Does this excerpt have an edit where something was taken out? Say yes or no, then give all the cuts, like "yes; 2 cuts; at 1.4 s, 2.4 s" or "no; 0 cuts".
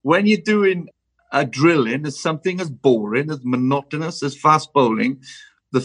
yes; 1 cut; at 0.9 s